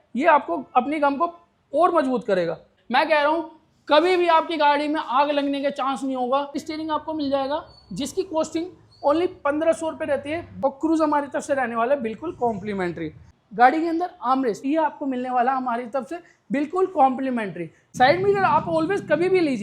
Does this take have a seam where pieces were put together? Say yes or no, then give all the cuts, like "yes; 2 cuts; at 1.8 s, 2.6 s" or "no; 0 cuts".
yes; 6 cuts; at 2.7 s, 6.6 s, 10.5 s, 13.3 s, 14.6 s, 17.8 s